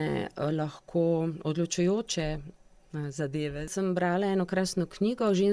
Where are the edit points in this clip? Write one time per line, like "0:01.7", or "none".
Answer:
0:03.7

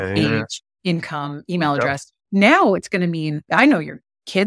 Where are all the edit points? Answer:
0:03.4

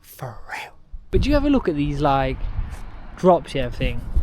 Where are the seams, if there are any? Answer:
0:00.9

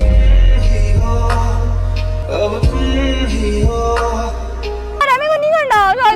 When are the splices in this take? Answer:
0:05.0

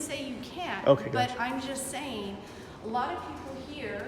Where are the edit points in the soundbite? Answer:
none

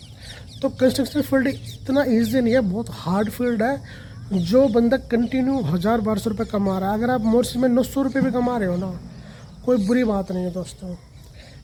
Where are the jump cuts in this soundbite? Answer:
none

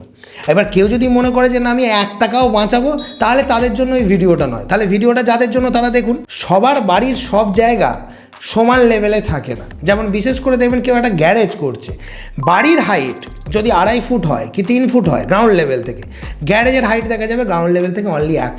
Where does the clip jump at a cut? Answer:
0:06.3

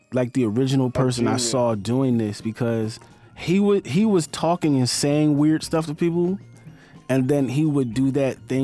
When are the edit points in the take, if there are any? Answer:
none

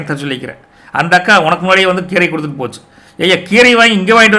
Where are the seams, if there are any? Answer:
none

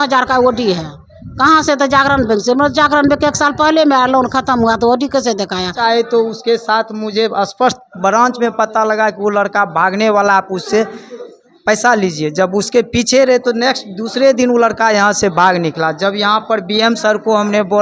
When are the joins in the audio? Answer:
0:05.8

